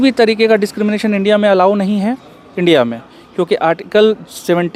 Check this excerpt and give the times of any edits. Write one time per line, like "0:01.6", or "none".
none